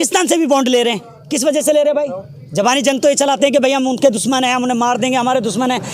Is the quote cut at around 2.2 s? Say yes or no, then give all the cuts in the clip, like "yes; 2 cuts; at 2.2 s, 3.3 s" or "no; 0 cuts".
no; 0 cuts